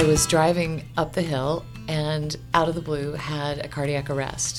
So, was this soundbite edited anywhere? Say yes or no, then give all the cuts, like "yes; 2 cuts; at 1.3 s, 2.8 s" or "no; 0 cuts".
no; 0 cuts